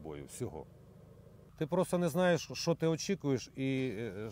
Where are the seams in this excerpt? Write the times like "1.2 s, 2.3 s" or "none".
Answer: 1.5 s